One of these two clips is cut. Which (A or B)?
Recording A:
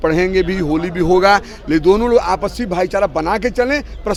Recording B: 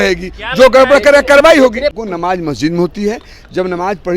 B